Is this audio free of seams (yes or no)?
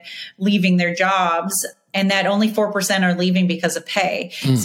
no